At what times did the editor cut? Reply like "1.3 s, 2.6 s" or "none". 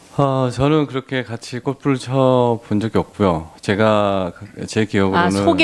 4.4 s